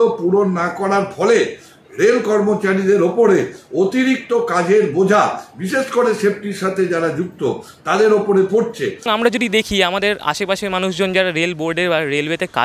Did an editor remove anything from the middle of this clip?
no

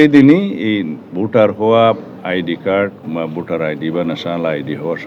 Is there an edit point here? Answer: no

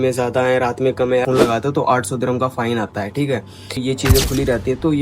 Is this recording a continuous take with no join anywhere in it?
no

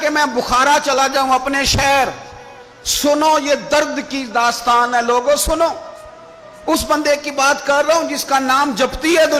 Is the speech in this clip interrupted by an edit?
no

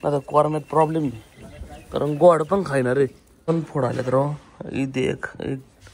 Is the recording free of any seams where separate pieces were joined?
no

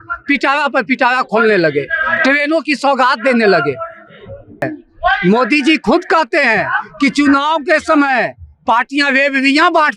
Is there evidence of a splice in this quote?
yes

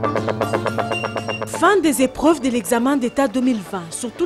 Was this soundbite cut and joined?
yes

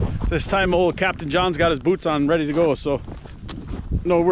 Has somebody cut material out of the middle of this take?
no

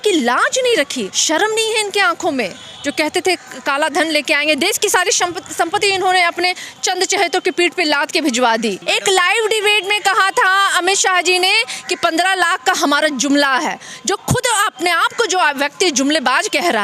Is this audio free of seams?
no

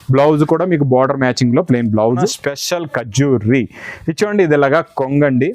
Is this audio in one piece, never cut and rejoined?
no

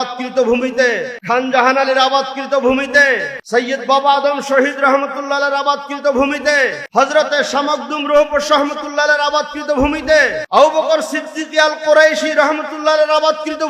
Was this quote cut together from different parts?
yes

